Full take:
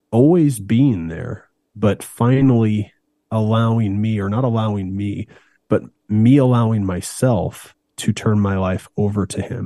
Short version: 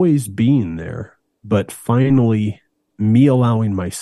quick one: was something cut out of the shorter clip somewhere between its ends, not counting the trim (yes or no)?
yes